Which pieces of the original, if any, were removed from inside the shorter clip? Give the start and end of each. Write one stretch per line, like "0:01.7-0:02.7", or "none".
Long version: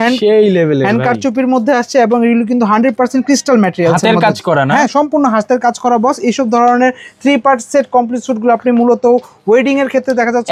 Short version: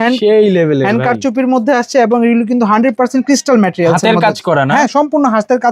none